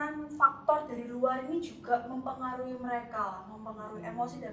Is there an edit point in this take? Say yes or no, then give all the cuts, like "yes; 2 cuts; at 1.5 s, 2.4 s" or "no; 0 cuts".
no; 0 cuts